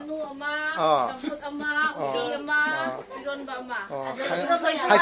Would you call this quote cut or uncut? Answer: uncut